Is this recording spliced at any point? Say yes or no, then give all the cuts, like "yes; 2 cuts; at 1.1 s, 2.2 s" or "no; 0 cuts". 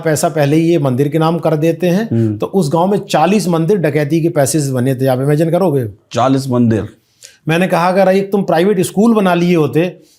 no; 0 cuts